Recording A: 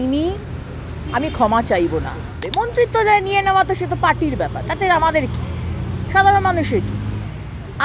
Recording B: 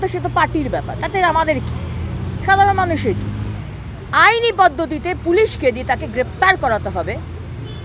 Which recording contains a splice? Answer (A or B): A